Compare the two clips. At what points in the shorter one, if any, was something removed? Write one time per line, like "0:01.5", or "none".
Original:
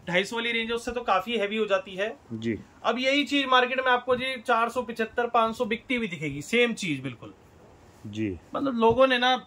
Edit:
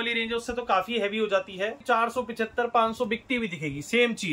0:01.8